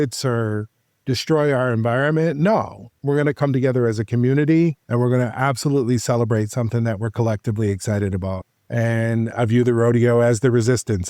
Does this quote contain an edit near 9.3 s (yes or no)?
yes